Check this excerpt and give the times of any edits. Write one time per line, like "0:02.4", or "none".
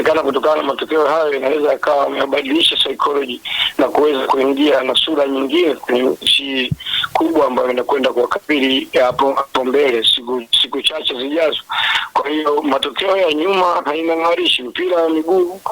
none

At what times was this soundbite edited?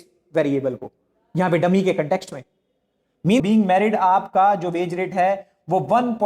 0:03.4

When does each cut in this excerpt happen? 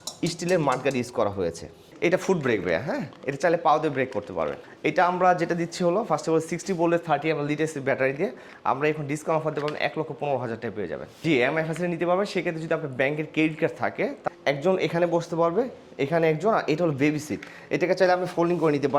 0:01.9
0:04.6
0:11.2
0:14.2

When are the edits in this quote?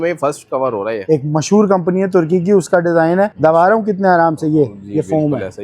0:00.9
0:03.3

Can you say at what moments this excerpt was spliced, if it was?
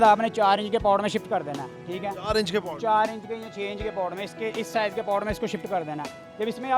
none

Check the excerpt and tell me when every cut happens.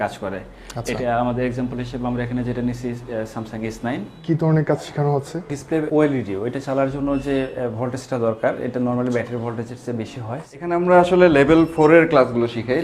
0:04.2
0:10.4

